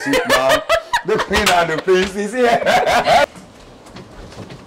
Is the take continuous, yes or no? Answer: no